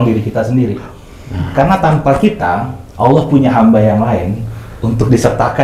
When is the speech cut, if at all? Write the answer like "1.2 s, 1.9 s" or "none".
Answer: none